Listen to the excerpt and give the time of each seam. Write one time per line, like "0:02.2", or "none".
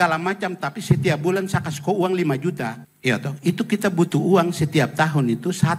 none